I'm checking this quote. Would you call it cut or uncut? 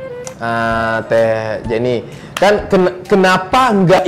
uncut